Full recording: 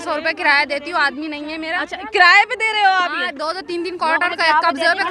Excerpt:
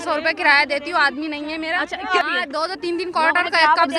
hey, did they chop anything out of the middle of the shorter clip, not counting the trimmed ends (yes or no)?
yes